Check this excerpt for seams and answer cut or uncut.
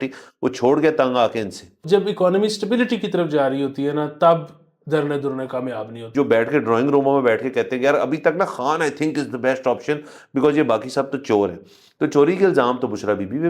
cut